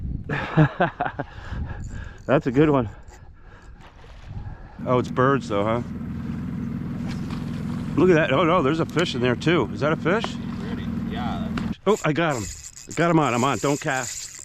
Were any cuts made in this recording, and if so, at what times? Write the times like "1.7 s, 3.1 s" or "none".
4.7 s, 11.7 s

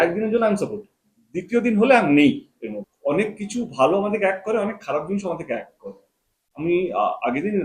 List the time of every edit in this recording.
2.8 s

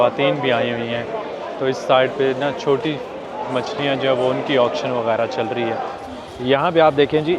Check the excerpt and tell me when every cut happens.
6.0 s

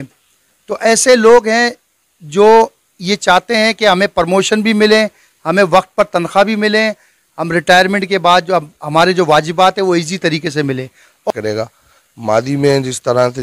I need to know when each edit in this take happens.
11.3 s

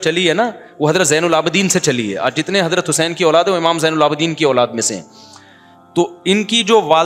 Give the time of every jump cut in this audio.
none

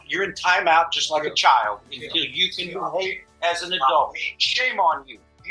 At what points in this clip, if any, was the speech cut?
1.0 s

